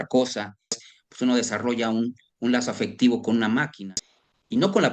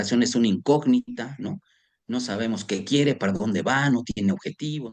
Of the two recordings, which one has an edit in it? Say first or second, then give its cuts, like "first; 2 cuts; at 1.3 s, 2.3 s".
first; 2 cuts; at 0.9 s, 3.7 s